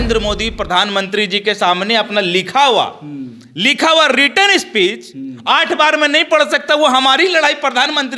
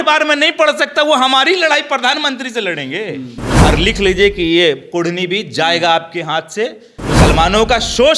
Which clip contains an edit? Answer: second; 2 cuts; at 3.4 s, 6.9 s

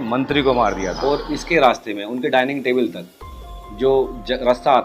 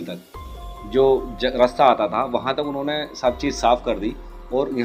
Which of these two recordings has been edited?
first; 1 cut; at 1.0 s

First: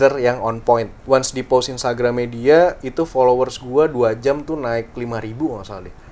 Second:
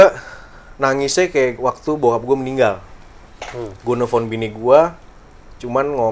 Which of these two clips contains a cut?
first; 1 cut; at 0.9 s

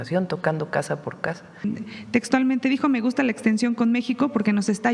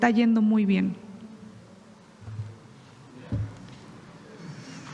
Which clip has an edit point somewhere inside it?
first; 1 cut; at 1.7 s

